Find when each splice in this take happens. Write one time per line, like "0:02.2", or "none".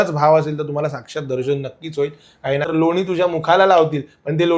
0:02.7